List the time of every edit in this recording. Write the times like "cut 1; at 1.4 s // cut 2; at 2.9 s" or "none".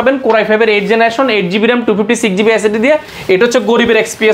cut 1; at 3.1 s